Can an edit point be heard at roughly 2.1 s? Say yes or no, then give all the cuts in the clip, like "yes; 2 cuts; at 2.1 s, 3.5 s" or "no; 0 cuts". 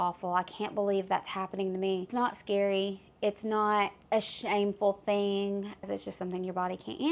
yes; 3 cuts; at 2.1 s, 4.0 s, 5.9 s